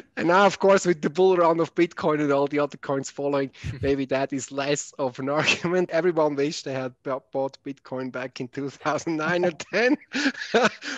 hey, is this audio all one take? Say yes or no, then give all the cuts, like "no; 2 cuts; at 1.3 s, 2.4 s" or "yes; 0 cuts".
no; 1 cut; at 5.9 s